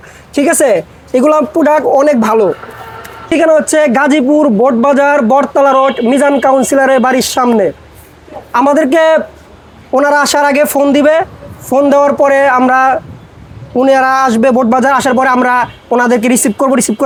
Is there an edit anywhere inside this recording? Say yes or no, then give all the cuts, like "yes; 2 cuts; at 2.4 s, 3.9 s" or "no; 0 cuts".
no; 0 cuts